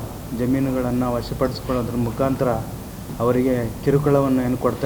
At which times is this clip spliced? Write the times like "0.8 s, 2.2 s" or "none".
none